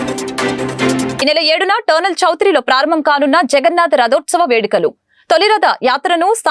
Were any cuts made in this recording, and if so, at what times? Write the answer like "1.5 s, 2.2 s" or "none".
1.2 s